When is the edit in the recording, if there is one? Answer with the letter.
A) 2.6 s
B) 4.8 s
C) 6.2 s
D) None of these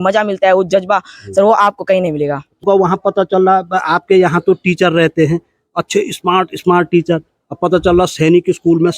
A